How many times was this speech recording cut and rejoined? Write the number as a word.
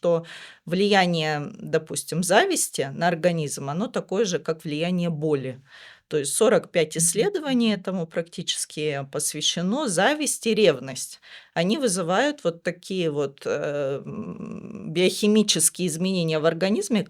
zero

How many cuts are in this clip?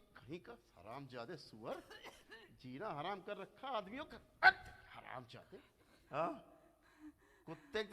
one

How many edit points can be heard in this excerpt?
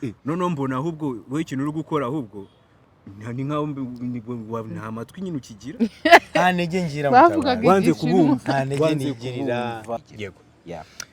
one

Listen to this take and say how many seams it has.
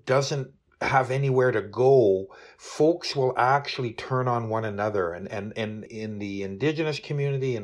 one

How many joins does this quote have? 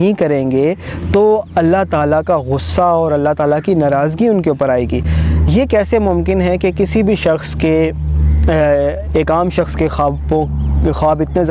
zero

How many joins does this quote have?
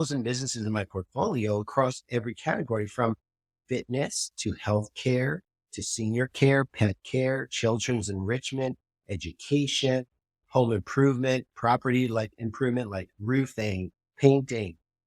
zero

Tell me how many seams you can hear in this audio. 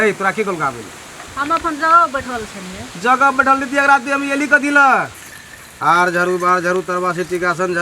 one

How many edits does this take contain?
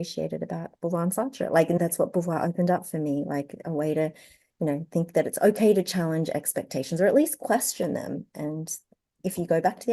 one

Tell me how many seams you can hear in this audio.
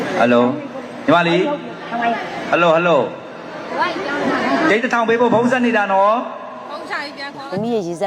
zero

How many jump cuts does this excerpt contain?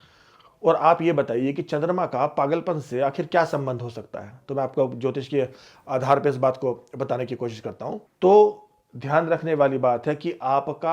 one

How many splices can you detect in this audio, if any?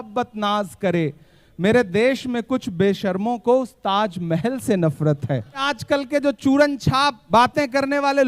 two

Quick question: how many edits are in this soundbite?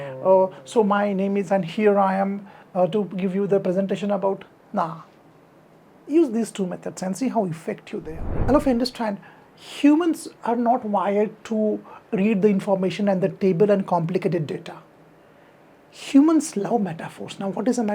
one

